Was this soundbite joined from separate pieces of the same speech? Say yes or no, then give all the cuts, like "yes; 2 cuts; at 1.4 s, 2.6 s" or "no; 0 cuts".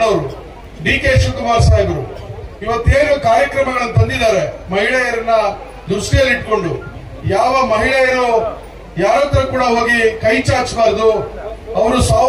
no; 0 cuts